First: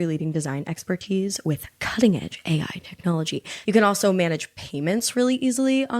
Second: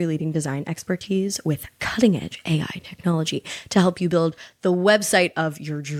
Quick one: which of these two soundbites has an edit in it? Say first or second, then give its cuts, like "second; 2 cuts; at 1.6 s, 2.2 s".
first; 1 cut; at 3.5 s